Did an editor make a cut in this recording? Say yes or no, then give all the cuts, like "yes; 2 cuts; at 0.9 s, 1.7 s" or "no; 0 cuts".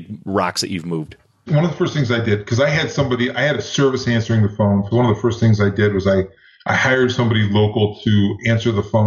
yes; 1 cut; at 1.5 s